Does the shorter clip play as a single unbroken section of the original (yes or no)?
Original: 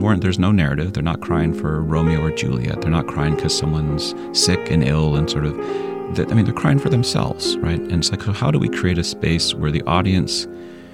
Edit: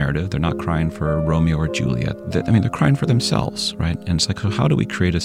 no